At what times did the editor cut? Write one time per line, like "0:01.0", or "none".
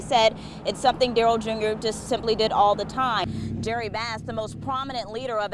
0:03.2